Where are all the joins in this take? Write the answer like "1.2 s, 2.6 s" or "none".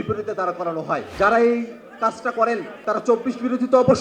1.1 s, 2.7 s